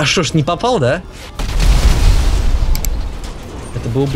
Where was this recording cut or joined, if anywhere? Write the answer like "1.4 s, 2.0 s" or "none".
1.2 s